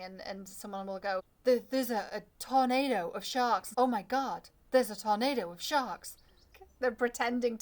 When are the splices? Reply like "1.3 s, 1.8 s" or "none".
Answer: 1.3 s, 3.7 s, 6.6 s